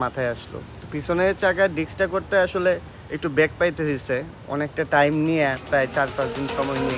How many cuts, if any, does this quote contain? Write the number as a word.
zero